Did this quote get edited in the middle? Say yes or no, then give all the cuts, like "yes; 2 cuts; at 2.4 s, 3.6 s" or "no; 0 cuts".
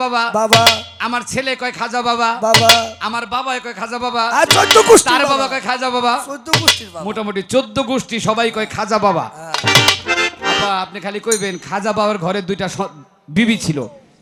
no; 0 cuts